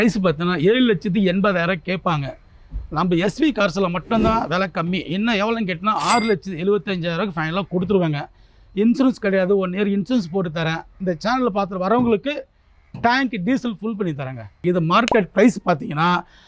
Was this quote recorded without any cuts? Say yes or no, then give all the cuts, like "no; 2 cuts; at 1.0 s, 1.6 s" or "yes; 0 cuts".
no; 1 cut; at 14.5 s